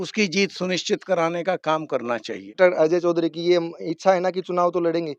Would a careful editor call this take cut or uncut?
cut